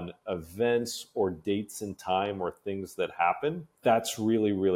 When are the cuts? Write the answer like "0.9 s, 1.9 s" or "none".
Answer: 3.7 s